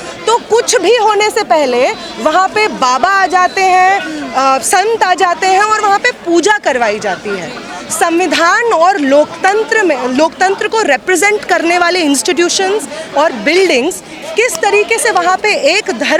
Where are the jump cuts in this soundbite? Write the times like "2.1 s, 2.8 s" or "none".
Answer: none